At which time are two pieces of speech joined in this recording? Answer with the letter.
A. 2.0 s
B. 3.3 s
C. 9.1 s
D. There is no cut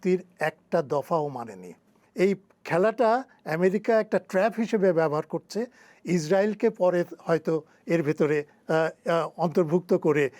A